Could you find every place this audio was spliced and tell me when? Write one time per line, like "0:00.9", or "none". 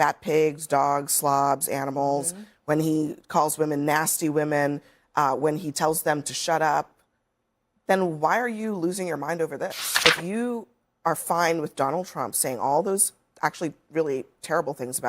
0:09.8